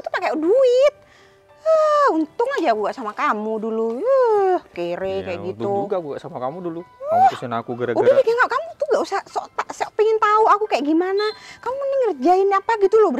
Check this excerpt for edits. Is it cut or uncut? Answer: uncut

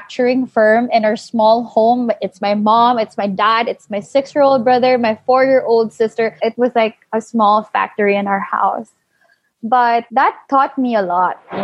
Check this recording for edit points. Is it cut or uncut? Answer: cut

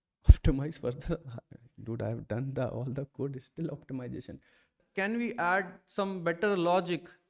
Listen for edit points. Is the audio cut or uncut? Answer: cut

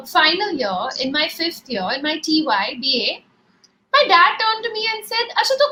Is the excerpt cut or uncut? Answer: uncut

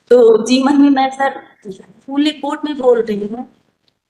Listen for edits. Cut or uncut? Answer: uncut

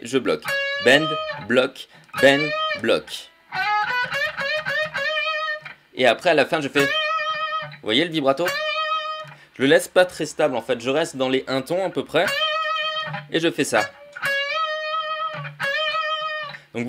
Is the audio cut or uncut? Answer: cut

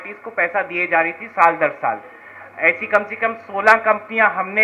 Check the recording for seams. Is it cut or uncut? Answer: uncut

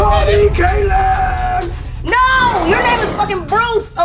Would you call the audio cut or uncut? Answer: uncut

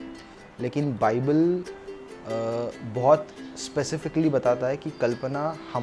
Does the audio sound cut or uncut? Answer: uncut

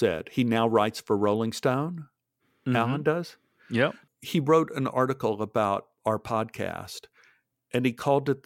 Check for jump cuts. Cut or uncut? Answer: cut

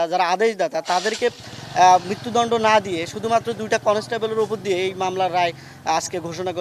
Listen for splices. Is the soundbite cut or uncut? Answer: uncut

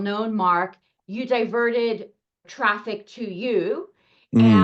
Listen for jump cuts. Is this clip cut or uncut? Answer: cut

